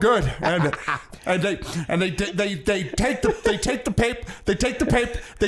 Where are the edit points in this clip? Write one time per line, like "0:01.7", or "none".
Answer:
0:01.0